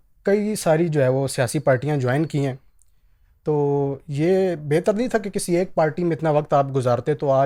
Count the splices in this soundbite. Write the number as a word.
zero